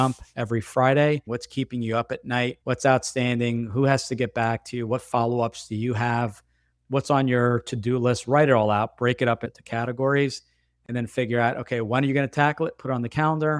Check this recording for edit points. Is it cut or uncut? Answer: uncut